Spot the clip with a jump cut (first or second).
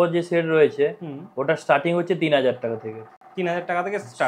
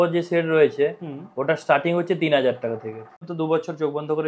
second